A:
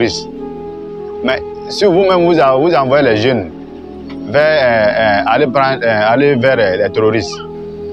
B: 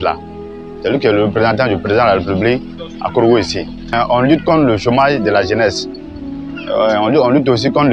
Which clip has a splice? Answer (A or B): B